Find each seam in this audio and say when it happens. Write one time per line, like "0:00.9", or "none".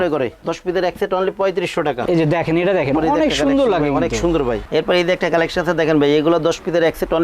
0:02.0
0:04.6

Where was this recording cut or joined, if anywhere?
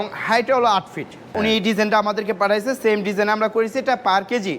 0:01.3

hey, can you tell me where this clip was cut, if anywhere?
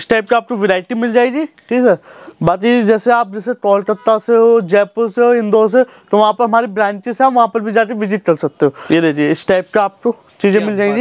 0:08.8

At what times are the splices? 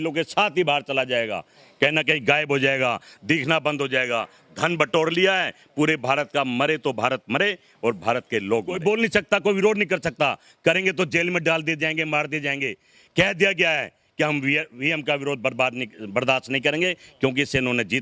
0:08.8

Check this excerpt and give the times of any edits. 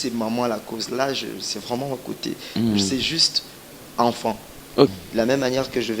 0:04.9

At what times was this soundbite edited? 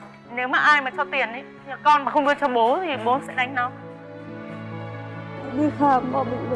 0:05.4

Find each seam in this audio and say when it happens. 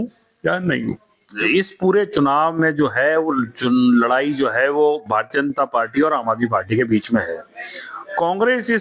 0:01.3

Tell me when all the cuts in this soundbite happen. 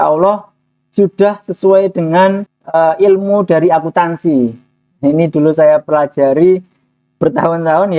0:02.5

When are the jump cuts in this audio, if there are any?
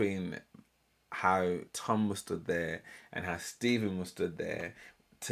none

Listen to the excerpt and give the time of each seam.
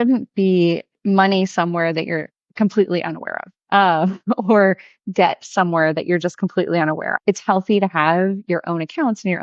0:00.9
0:07.1

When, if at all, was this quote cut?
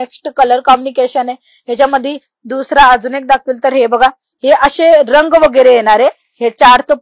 none

